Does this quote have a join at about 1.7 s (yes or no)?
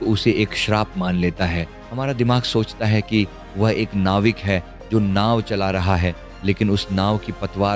yes